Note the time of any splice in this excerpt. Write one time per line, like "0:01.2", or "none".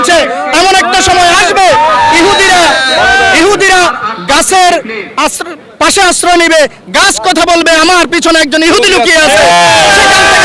none